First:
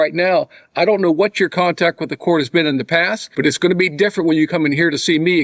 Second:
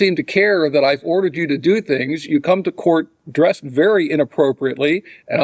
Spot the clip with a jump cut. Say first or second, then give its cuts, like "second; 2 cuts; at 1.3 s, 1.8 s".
first; 1 cut; at 3.2 s